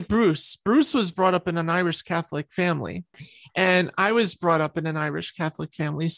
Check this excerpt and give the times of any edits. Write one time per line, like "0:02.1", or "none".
0:03.2